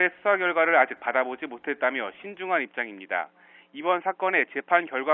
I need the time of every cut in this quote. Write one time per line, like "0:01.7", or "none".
none